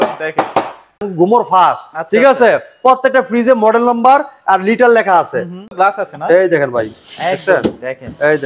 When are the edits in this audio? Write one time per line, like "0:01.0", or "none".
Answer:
0:01.0
0:05.7